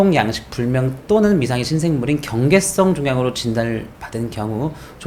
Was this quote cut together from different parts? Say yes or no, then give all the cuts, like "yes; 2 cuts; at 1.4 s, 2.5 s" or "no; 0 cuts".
no; 0 cuts